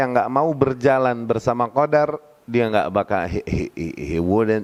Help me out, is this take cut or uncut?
uncut